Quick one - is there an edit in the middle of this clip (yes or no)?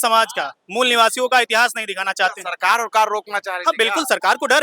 no